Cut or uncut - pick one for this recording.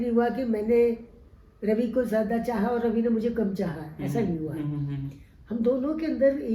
uncut